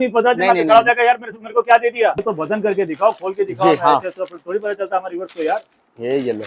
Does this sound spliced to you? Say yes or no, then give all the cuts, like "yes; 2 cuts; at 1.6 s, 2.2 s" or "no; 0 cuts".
yes; 1 cut; at 2.2 s